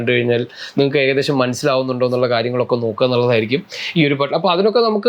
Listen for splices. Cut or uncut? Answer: uncut